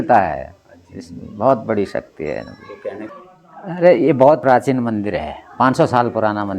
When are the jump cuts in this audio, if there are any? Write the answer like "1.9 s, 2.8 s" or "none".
3.1 s, 4.4 s